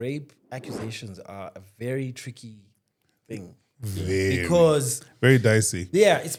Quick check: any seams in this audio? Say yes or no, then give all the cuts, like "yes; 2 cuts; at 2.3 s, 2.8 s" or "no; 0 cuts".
no; 0 cuts